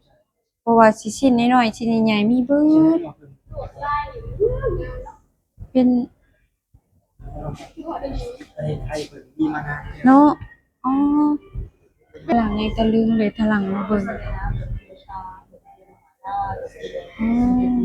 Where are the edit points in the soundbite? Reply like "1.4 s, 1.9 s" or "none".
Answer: 12.3 s